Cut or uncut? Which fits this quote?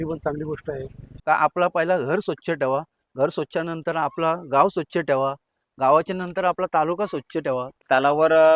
cut